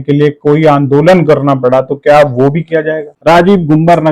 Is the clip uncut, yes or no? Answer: no